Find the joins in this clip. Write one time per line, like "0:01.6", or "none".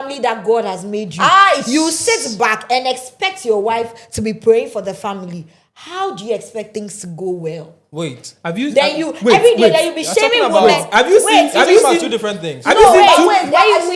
none